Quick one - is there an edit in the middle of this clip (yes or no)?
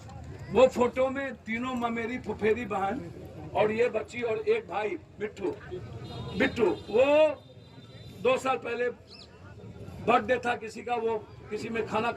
no